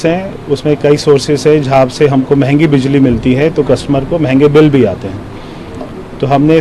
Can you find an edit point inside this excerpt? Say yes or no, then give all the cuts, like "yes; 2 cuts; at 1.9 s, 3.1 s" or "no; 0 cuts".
no; 0 cuts